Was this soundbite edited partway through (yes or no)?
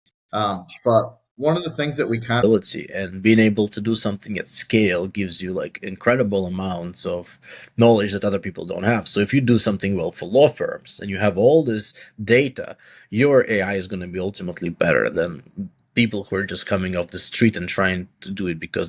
yes